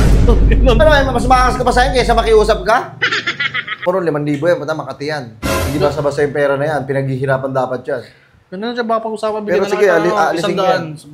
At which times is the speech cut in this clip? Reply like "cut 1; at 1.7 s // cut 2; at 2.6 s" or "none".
cut 1; at 3.8 s